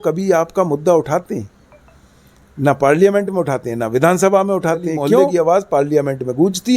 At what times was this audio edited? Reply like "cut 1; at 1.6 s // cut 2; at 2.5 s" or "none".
cut 1; at 5.3 s